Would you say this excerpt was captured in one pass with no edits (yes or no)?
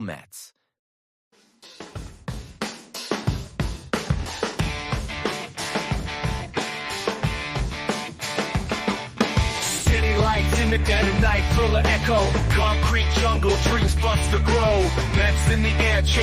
no